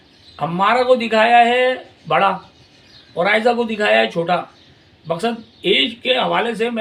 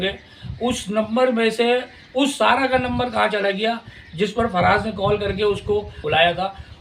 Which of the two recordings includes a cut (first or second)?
second